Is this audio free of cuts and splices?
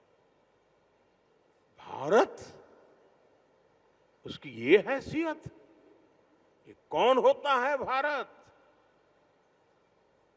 yes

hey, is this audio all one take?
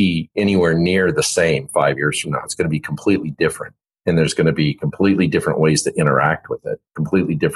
yes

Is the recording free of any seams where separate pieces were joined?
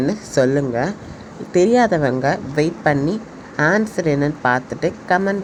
yes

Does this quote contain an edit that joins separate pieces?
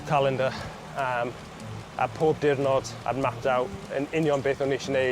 yes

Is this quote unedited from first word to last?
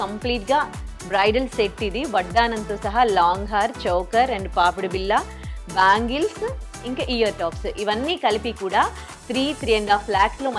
yes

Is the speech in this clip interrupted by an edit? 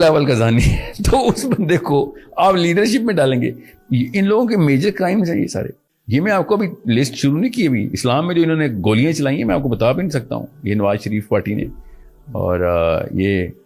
yes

